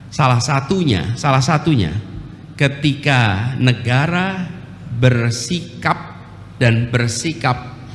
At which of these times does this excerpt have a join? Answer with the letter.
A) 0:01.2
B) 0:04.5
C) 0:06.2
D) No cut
D